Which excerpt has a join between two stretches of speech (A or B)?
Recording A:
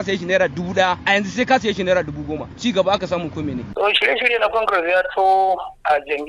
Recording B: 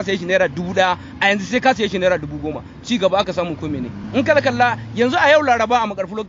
A